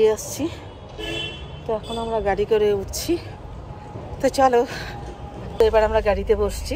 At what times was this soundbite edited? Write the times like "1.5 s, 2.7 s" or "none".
none